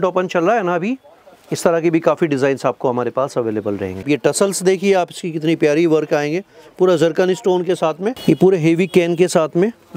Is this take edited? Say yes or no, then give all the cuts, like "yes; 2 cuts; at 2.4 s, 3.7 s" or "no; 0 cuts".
yes; 2 cuts; at 4.0 s, 8.2 s